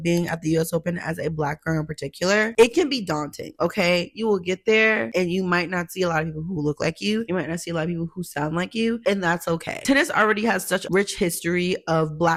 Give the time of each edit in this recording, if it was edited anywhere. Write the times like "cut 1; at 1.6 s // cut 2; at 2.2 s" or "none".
none